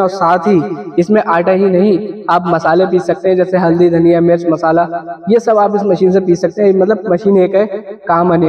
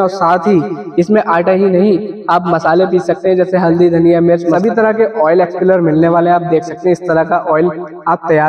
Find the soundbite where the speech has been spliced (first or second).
second